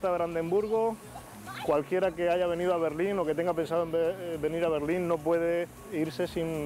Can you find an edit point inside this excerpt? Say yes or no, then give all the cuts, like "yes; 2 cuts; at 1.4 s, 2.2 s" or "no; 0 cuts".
no; 0 cuts